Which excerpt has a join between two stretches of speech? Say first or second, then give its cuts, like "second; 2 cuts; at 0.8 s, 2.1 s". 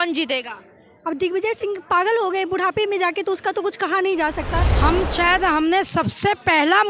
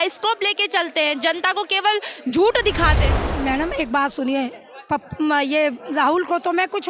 first; 1 cut; at 4.7 s